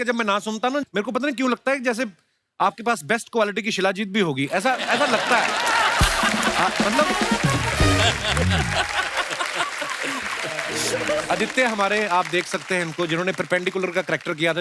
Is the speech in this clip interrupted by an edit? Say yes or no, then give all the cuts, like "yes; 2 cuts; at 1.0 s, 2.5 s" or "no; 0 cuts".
yes; 1 cut; at 11.2 s